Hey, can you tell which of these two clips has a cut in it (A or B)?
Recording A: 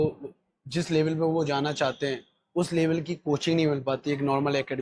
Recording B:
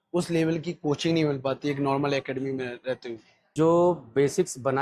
B